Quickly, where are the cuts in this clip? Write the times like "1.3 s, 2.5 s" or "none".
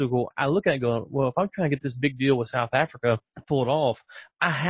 3.3 s